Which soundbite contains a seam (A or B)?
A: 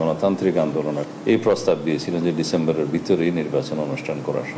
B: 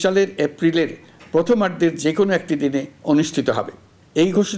A